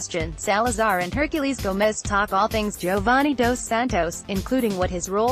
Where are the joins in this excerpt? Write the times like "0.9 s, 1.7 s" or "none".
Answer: 1.1 s